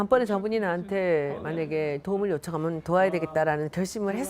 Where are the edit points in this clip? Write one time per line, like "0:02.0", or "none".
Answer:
none